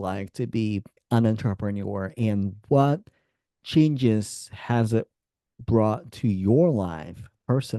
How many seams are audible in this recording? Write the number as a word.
one